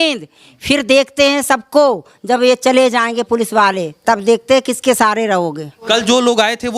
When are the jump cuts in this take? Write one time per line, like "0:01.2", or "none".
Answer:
0:05.7